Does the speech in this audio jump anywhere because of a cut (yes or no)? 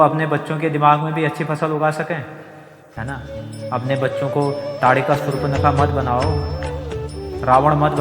yes